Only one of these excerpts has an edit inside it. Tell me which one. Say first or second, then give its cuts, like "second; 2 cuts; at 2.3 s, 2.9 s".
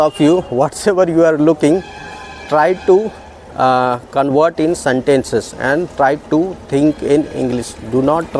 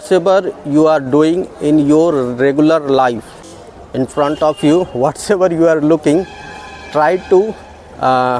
second; 1 cut; at 3.3 s